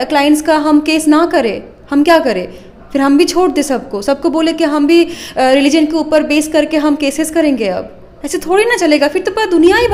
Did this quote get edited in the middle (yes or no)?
no